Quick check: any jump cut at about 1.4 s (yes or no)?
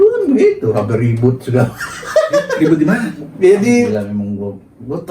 no